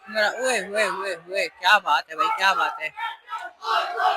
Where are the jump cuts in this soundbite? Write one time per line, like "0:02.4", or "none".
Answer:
none